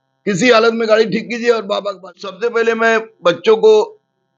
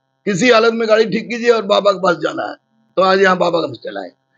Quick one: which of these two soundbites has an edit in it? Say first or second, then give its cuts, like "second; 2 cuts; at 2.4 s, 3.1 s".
first; 1 cut; at 2.4 s